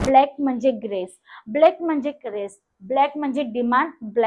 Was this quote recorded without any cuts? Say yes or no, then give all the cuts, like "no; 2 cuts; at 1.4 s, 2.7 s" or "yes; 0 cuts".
yes; 0 cuts